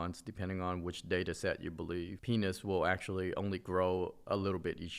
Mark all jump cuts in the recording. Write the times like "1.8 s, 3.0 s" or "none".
2.2 s